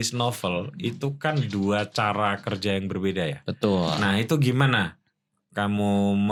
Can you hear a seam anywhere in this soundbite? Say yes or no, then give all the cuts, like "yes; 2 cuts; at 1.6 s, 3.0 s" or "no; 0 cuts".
no; 0 cuts